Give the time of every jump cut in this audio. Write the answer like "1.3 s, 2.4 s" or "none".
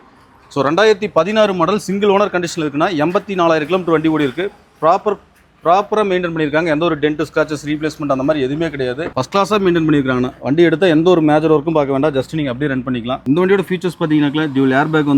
none